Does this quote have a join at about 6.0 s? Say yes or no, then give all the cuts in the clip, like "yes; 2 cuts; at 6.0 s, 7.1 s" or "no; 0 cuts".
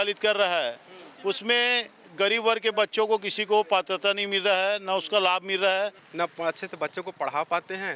yes; 1 cut; at 6.0 s